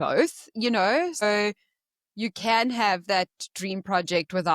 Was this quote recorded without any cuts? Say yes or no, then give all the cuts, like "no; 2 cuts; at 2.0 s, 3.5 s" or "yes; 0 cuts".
no; 1 cut; at 1.2 s